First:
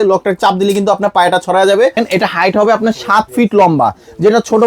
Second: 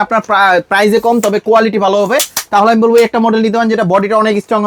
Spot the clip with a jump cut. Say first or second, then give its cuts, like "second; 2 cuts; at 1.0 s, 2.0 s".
first; 1 cut; at 1.9 s